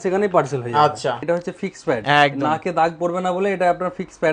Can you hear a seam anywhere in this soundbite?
yes; 1 cut; at 1.2 s

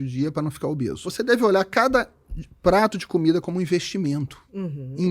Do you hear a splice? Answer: yes; 1 cut; at 1.0 s

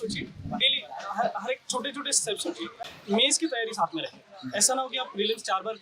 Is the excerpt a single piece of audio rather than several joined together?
no; 1 cut; at 2.8 s

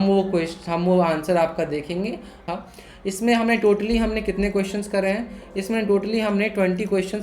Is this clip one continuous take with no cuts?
no; 1 cut; at 2.5 s

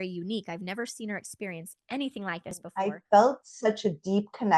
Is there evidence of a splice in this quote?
yes; 1 cut; at 2.7 s

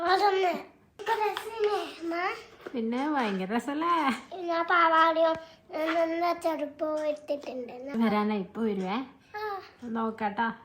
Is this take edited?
yes; 2 cuts; at 1.4 s, 7.9 s

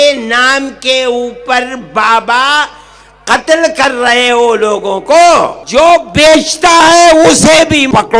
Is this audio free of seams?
no; 1 cut; at 5.6 s

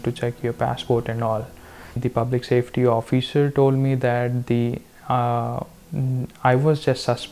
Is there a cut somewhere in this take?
yes; 1 cut; at 2.0 s

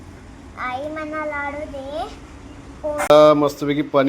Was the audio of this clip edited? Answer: yes; 1 cut; at 3.1 s

